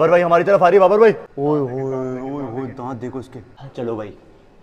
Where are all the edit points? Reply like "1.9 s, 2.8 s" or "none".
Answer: 1.3 s, 3.6 s